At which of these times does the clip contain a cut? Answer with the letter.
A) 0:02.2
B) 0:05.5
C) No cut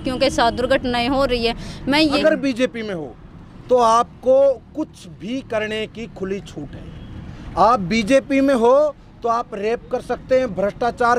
A